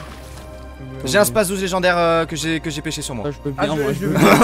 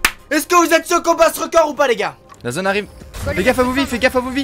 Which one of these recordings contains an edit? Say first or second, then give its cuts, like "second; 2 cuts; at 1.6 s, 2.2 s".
second; 1 cut; at 2.2 s